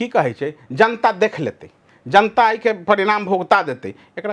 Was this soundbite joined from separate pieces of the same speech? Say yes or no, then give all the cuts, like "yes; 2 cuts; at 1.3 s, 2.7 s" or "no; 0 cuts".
no; 0 cuts